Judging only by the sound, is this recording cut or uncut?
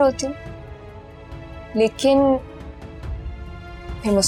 uncut